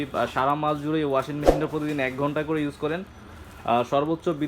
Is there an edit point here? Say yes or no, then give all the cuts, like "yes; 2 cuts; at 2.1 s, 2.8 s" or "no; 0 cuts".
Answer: no; 0 cuts